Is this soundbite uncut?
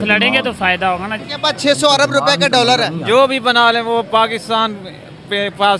no; 1 cut; at 1.2 s

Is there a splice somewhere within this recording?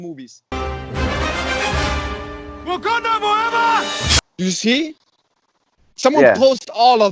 no; 0 cuts

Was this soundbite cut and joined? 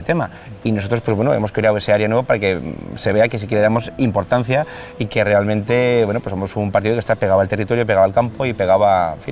no; 0 cuts

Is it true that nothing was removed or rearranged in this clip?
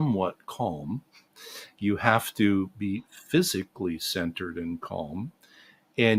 yes; 0 cuts

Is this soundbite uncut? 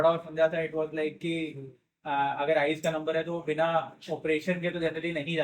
yes; 0 cuts

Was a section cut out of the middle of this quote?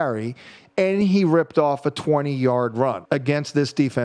yes; 1 cut; at 3.0 s

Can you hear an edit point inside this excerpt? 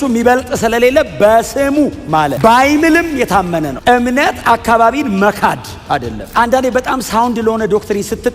yes; 2 cuts; at 3.7 s, 6.2 s

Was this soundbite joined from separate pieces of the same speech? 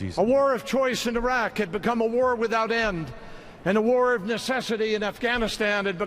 yes; 1 cut; at 3.2 s

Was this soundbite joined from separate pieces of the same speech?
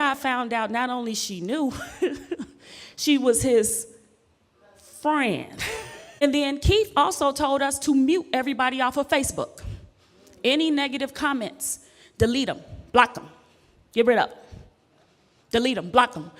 yes; 1 cut; at 6.2 s

